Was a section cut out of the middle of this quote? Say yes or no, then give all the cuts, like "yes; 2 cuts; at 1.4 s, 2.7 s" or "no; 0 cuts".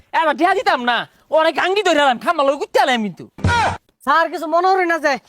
yes; 1 cut; at 3.5 s